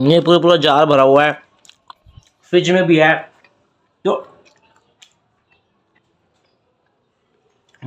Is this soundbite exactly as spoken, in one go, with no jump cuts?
yes; 0 cuts

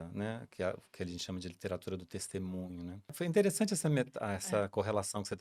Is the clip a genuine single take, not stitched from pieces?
no; 1 cut; at 3.2 s

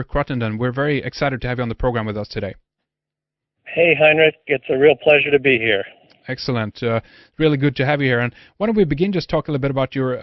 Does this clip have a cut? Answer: yes; 1 cut; at 8.0 s

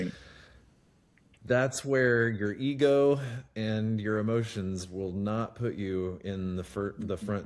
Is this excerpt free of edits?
yes; 0 cuts

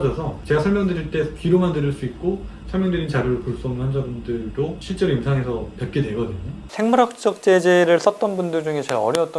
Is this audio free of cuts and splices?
no; 2 cuts; at 4.8 s, 6.5 s

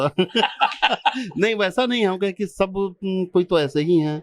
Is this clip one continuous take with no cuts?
yes; 0 cuts

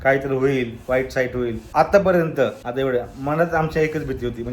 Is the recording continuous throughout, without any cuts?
no; 2 cuts; at 1.6 s, 2.6 s

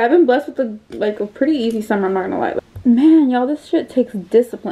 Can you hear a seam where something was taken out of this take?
yes; 1 cut; at 2.5 s

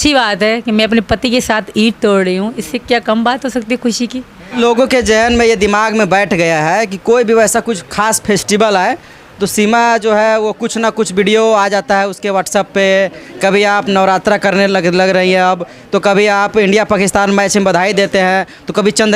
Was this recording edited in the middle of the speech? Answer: yes; 1 cut; at 4.6 s

